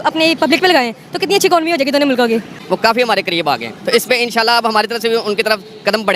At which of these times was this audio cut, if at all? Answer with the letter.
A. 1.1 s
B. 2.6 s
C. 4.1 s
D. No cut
B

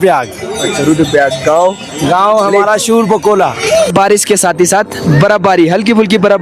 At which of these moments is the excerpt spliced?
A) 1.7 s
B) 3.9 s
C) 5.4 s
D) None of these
B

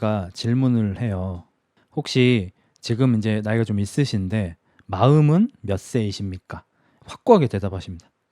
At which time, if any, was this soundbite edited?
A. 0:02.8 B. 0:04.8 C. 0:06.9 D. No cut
C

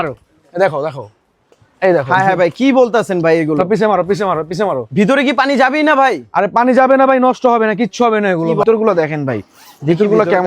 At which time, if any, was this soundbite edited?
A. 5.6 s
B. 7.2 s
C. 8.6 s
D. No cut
C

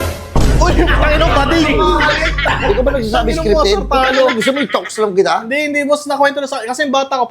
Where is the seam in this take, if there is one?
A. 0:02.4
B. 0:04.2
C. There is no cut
A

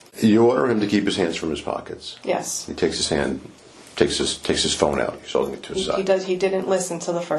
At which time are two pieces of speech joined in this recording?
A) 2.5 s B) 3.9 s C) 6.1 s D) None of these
D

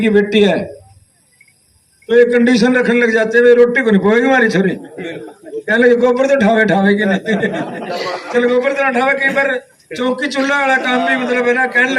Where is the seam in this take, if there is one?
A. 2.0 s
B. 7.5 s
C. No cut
C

